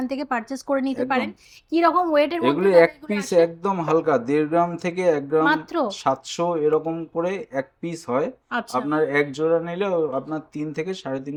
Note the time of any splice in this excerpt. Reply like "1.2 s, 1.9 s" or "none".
none